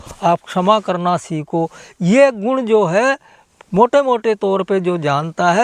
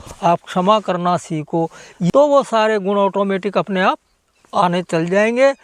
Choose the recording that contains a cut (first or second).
second